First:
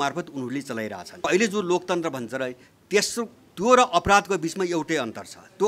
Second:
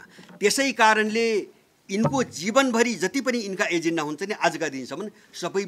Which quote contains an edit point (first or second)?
first